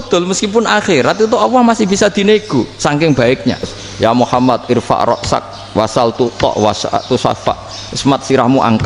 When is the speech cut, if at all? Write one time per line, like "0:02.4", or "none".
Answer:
0:03.8